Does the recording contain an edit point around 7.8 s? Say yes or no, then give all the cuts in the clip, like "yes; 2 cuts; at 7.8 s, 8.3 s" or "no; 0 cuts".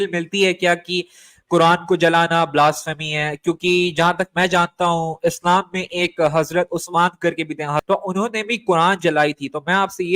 yes; 1 cut; at 7.8 s